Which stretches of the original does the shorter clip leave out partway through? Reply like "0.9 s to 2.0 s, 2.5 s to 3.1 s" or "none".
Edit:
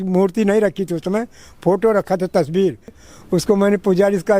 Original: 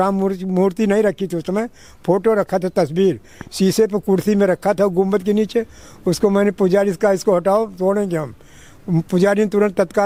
3.4 s to 5.8 s